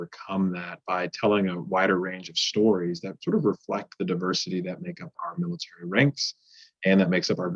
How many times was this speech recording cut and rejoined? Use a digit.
1